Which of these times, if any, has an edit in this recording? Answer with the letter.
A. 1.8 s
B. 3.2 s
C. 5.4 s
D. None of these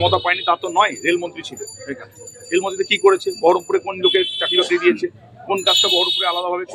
D